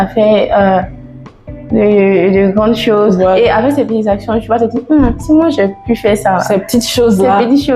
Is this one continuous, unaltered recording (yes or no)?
yes